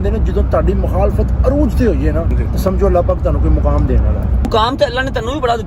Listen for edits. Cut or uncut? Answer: cut